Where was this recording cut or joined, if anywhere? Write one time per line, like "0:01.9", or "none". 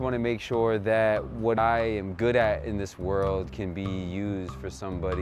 0:01.6